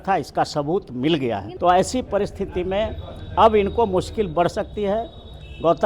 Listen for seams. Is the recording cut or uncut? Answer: cut